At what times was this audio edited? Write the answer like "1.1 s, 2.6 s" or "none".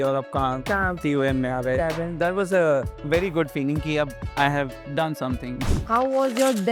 2.9 s, 4.2 s, 5.6 s